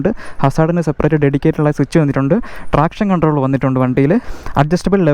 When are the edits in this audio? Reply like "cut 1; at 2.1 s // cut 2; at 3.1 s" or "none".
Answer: none